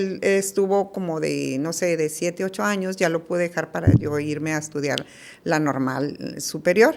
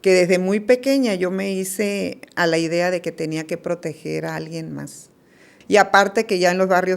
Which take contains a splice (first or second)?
second